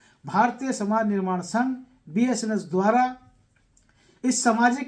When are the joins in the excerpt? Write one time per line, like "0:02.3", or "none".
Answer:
none